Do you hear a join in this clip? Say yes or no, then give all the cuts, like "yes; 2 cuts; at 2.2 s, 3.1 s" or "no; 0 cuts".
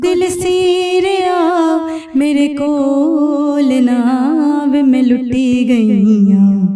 no; 0 cuts